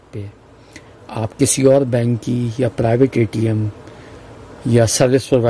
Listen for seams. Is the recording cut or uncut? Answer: uncut